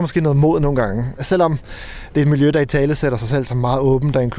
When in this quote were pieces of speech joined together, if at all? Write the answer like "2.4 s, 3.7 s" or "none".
1.2 s